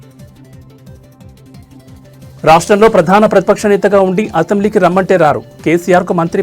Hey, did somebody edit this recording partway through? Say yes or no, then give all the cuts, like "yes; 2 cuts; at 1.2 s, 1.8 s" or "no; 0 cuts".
yes; 1 cut; at 2.3 s